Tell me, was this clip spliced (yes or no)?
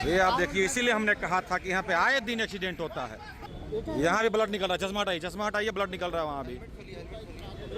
yes